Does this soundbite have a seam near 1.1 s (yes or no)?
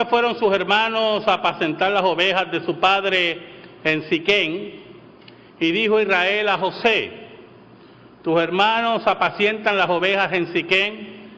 no